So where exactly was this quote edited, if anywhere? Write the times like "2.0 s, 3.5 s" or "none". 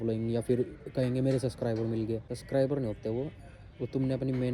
2.3 s